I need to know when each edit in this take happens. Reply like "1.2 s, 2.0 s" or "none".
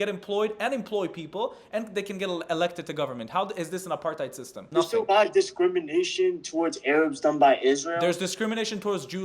4.5 s